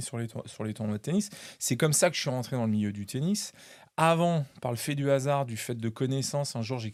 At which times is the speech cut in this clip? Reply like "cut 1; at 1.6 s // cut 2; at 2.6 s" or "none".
none